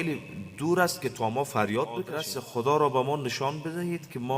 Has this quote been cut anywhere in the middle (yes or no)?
yes